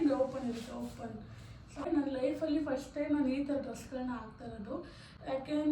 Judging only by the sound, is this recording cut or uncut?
cut